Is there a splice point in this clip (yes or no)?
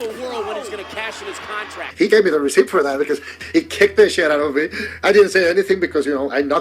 yes